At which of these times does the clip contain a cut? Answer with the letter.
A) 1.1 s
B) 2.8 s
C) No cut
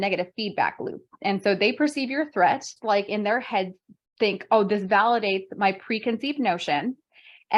B